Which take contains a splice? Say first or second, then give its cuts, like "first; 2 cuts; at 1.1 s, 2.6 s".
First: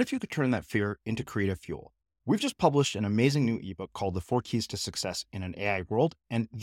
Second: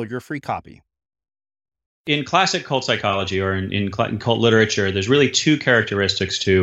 second; 1 cut; at 1.9 s